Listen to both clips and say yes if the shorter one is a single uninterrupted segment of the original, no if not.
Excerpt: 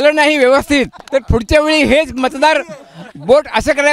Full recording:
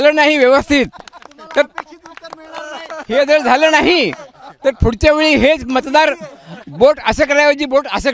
no